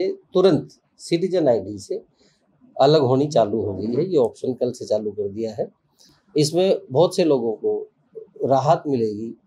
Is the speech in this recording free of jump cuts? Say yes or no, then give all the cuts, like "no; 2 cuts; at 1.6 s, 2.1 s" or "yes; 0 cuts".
yes; 0 cuts